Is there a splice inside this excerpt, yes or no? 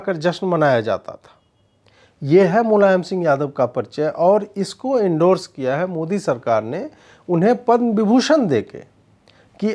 no